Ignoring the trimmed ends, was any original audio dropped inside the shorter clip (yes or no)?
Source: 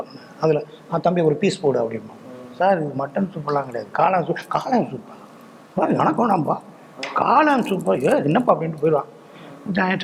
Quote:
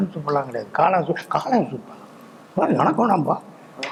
no